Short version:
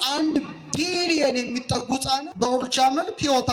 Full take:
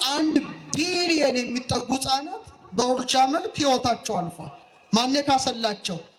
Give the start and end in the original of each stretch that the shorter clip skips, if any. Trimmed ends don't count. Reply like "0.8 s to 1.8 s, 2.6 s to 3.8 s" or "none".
2.3 s to 2.7 s